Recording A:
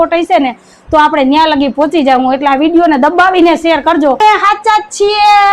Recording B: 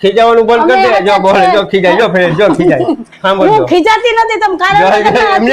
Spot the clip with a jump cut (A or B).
A